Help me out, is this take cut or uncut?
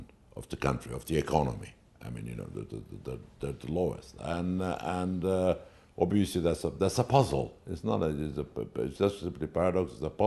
uncut